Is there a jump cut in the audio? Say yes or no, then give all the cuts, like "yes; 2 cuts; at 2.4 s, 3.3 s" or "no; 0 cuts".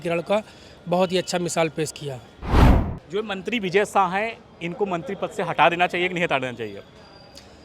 yes; 1 cut; at 2.7 s